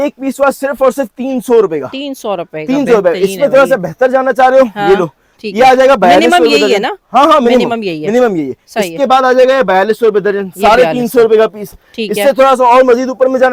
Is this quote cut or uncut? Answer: uncut